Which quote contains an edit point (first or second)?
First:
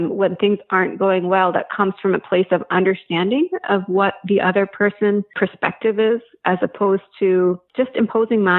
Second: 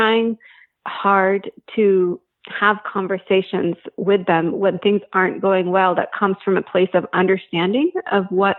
first